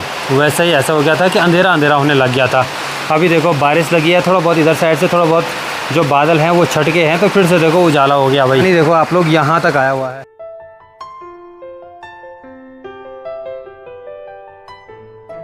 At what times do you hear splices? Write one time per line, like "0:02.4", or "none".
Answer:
none